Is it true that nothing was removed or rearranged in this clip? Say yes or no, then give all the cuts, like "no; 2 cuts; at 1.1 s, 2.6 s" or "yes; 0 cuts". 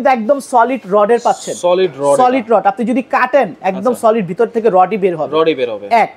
yes; 0 cuts